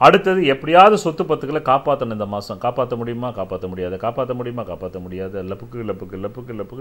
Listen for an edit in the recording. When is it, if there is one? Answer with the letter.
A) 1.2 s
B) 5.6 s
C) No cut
C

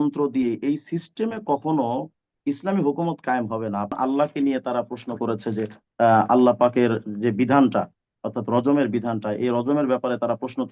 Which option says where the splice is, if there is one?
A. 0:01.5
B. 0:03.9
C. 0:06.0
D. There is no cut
B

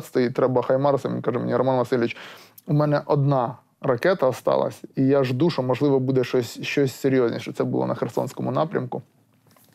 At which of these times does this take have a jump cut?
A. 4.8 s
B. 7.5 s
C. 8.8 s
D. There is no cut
D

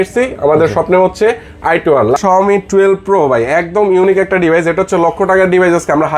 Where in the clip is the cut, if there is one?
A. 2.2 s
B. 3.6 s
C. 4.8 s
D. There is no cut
A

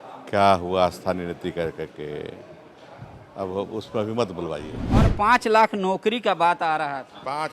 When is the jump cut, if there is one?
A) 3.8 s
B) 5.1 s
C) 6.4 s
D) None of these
B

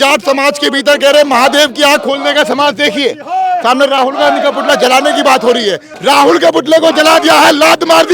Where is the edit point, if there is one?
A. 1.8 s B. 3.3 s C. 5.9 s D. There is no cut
C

